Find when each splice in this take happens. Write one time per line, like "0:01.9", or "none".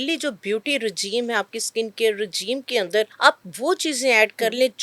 0:03.1